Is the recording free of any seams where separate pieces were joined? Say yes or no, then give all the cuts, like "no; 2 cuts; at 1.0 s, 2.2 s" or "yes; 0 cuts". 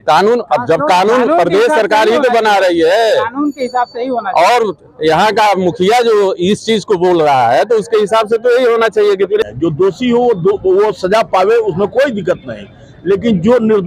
no; 1 cut; at 9.4 s